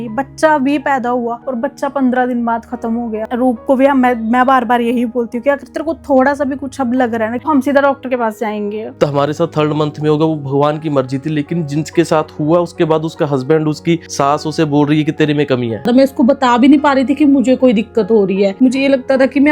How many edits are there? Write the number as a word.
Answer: four